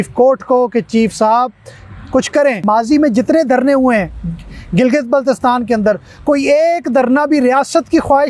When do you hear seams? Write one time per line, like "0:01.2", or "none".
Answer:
0:02.6